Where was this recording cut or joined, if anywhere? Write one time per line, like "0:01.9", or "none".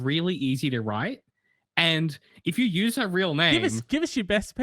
none